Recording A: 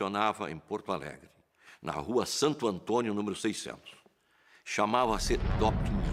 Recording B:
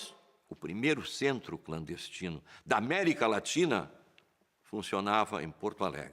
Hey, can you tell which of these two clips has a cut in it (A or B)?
B